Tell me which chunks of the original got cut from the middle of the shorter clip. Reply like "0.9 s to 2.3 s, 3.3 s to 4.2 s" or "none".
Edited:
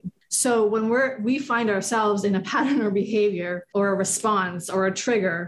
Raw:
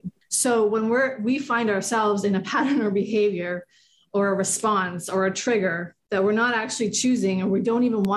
3.6 s to 4.0 s